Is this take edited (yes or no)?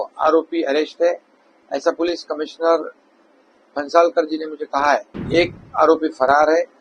yes